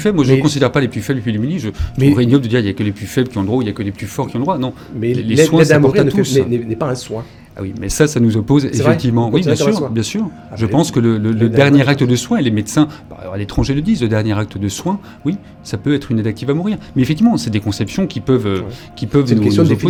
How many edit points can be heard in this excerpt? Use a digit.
0